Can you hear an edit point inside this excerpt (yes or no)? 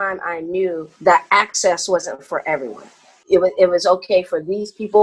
yes